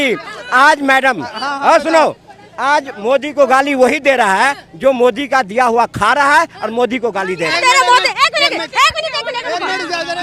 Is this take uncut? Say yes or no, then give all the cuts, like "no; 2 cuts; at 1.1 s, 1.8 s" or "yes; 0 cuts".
yes; 0 cuts